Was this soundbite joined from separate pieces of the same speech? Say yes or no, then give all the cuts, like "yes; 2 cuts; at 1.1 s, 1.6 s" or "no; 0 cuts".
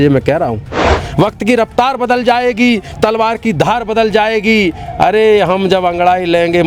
yes; 1 cut; at 0.9 s